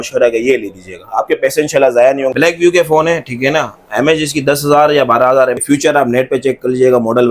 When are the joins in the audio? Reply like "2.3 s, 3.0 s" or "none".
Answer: 2.3 s, 5.6 s